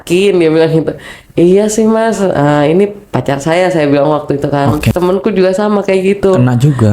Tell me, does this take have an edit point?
yes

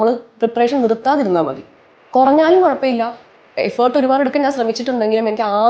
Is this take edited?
no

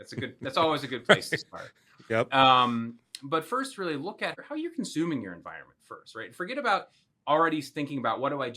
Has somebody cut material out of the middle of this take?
yes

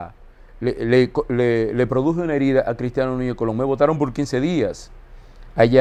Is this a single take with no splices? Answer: yes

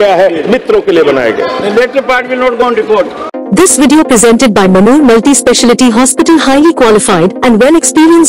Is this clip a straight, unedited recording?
yes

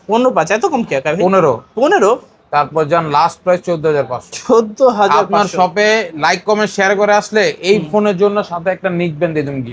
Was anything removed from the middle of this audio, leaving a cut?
no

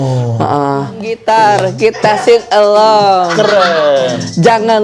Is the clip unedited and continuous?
no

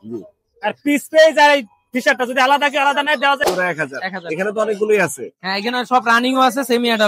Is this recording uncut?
no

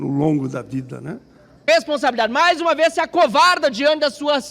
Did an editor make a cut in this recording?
yes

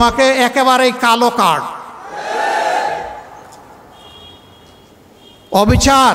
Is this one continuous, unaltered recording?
yes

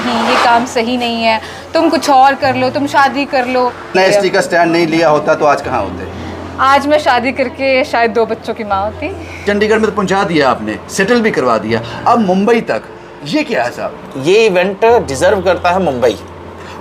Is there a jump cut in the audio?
yes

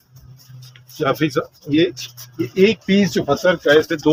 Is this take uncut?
yes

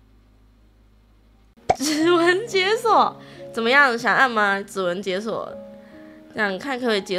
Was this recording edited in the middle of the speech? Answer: yes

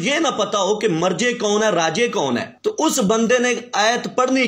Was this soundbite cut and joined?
no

